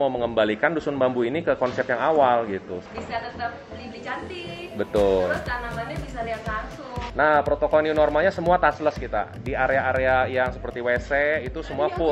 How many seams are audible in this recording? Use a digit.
2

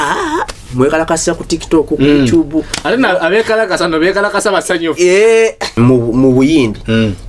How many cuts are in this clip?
1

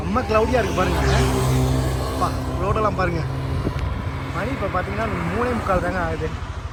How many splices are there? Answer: 0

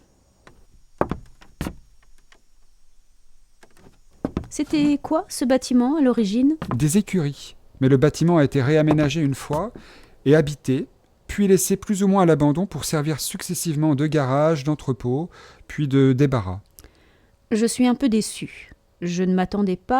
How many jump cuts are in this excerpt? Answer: 1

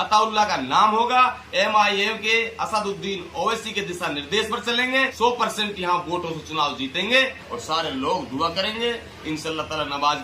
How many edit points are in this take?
2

